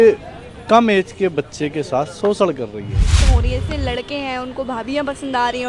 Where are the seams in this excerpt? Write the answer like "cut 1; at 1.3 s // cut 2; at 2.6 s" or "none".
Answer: cut 1; at 3.3 s